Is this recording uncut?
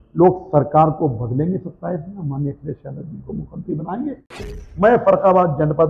no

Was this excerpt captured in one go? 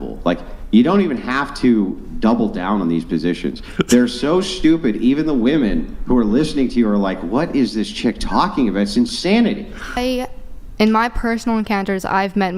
no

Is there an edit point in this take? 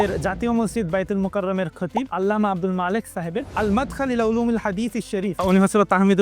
yes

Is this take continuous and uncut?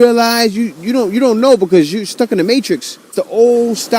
no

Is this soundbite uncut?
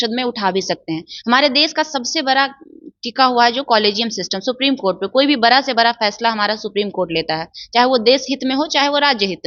yes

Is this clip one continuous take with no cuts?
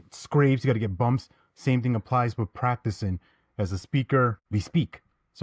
no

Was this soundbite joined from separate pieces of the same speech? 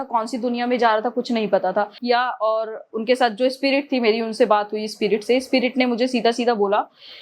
yes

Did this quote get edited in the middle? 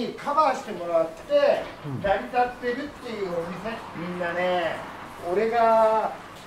no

